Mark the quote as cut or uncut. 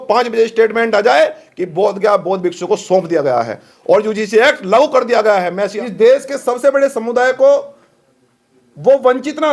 cut